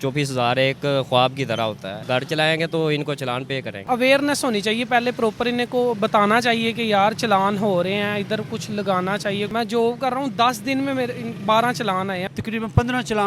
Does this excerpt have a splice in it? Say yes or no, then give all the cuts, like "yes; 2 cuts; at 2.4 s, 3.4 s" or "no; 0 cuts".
yes; 4 cuts; at 2.0 s, 3.9 s, 9.5 s, 12.2 s